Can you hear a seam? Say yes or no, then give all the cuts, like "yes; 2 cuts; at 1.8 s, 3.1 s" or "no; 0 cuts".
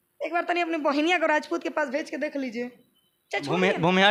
no; 0 cuts